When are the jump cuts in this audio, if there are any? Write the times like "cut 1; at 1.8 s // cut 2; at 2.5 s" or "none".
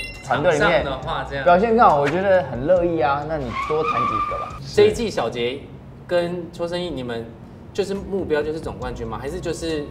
cut 1; at 4.5 s